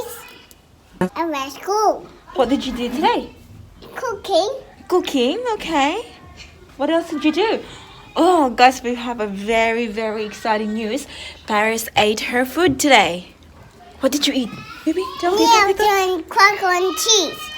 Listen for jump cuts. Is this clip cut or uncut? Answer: cut